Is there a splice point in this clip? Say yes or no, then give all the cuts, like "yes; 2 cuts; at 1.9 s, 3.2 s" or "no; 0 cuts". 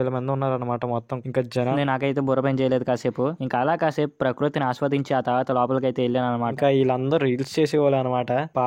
yes; 2 cuts; at 1.5 s, 6.5 s